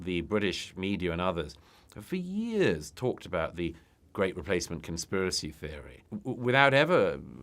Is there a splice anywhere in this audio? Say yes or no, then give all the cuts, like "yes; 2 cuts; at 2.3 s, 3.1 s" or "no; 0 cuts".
yes; 1 cut; at 6.1 s